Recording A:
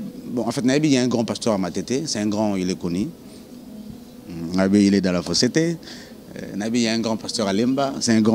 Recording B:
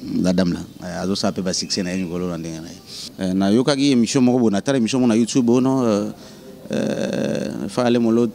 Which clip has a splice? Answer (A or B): B